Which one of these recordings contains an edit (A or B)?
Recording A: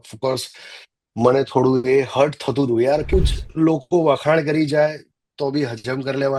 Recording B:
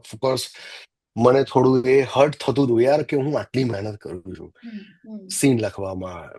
A